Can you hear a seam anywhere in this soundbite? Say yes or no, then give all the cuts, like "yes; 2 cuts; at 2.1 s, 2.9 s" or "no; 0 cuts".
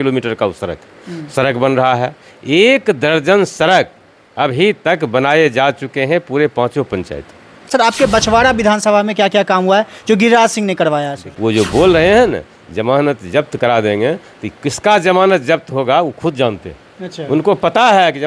yes; 2 cuts; at 7.7 s, 11.3 s